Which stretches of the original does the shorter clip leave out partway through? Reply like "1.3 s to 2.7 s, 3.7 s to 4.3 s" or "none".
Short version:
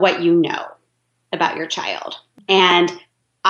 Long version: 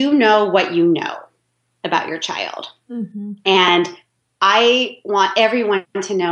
2.9 s to 3.3 s